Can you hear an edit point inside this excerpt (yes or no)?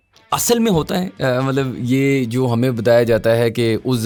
no